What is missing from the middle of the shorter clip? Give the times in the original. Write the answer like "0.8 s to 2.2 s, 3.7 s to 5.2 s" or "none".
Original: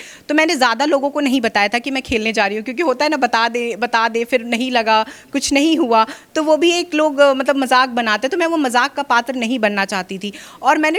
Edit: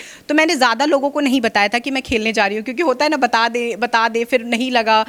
none